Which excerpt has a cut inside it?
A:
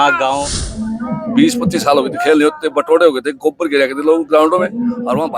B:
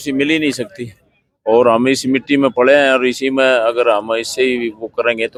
A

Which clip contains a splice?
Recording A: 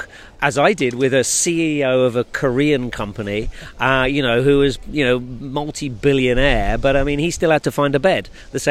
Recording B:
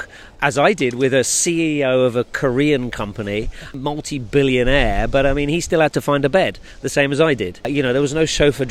B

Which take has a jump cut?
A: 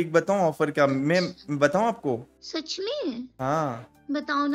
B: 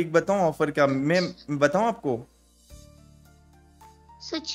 A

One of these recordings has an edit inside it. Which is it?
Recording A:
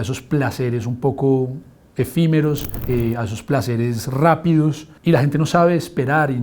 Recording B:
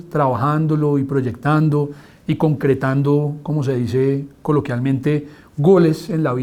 A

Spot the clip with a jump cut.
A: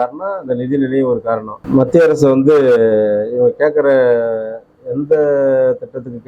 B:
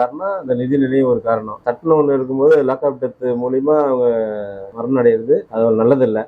B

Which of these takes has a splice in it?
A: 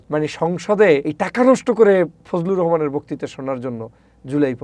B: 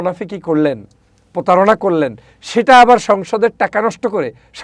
A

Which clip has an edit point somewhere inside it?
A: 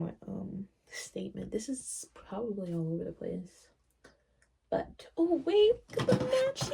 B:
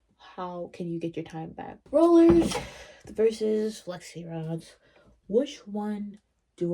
B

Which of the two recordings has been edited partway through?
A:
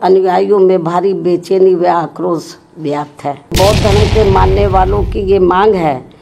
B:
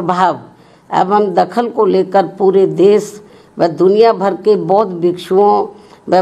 A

